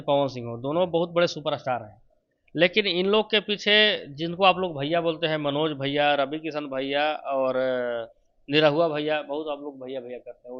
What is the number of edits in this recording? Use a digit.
0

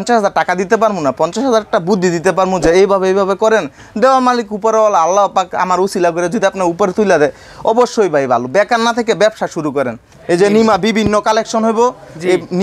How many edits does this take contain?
1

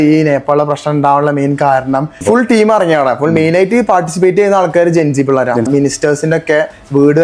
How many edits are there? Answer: 2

